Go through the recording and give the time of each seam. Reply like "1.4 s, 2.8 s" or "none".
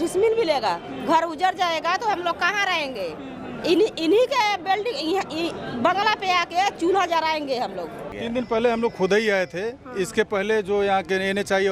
8.2 s